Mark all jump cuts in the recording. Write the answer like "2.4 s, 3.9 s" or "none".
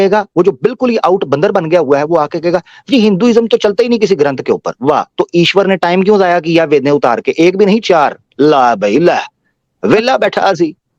none